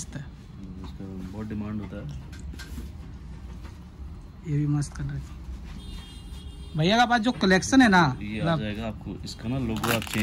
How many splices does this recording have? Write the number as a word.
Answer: zero